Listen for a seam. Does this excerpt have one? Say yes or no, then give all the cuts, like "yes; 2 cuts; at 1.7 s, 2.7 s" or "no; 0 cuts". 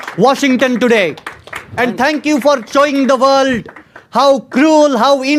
no; 0 cuts